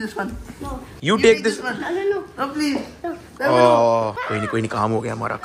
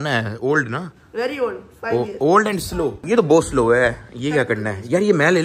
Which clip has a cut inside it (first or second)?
second